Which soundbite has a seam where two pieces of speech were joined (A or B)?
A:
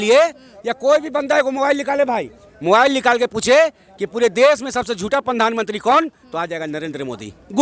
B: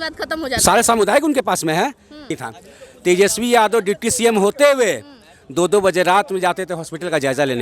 B